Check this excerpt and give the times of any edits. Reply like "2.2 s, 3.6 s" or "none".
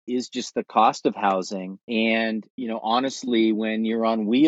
1.7 s, 2.5 s

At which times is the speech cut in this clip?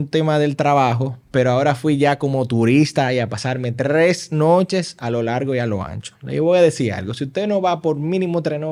none

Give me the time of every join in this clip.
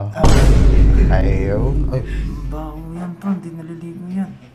none

